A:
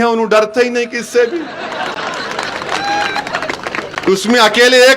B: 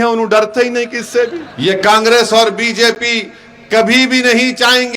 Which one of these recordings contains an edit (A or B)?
B